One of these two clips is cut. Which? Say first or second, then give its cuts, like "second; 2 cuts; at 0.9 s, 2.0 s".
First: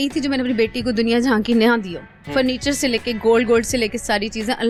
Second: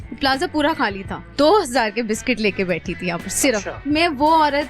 second; 2 cuts; at 1.2 s, 3.8 s